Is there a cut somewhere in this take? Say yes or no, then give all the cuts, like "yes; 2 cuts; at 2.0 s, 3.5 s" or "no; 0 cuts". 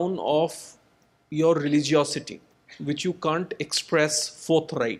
no; 0 cuts